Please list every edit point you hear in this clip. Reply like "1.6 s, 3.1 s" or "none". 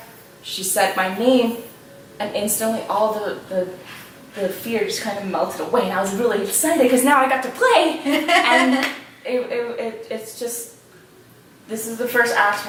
none